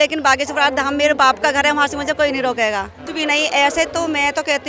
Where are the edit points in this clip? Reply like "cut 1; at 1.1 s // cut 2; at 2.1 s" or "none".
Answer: cut 1; at 3.0 s